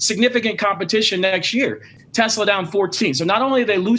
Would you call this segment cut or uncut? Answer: cut